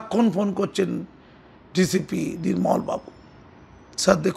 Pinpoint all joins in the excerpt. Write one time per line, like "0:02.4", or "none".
none